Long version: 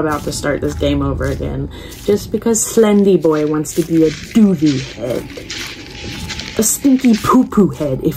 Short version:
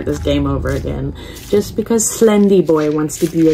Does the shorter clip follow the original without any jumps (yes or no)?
yes